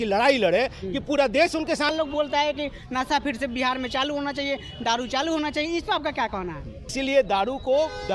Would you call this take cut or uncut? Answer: cut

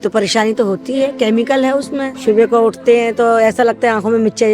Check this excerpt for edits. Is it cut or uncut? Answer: cut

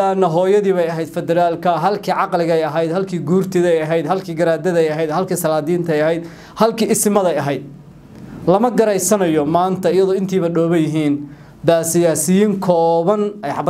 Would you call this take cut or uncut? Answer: uncut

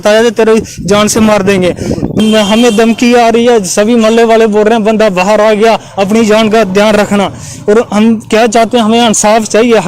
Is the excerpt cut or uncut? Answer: cut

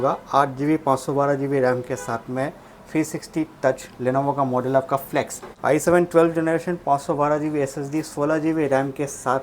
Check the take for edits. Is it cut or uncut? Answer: cut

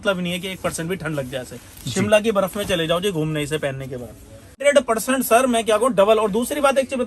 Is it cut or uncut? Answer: cut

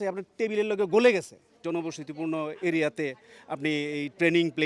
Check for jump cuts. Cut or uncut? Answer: cut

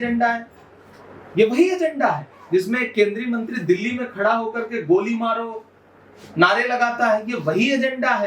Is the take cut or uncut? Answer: uncut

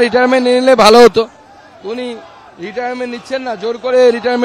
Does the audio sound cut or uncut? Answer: uncut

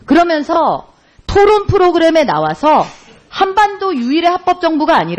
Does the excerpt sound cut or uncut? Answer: cut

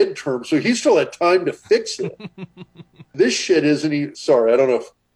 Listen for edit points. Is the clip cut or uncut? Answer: cut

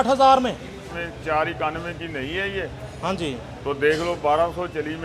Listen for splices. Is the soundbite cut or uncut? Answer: cut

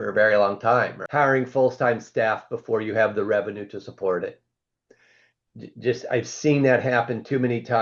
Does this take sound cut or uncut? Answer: cut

